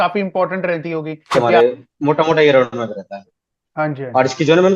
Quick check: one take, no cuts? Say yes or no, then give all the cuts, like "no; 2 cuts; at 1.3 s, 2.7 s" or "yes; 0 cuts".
no; 1 cut; at 1.3 s